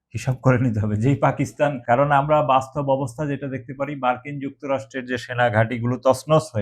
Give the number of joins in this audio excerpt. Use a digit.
1